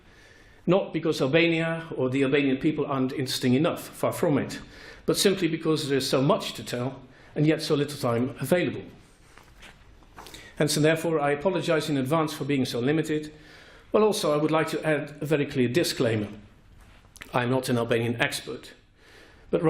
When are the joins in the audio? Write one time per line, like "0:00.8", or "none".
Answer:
0:01.7